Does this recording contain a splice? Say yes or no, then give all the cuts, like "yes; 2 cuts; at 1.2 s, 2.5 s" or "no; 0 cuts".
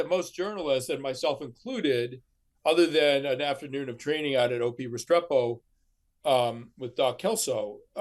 no; 0 cuts